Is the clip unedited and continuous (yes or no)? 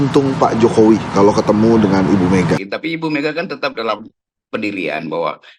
no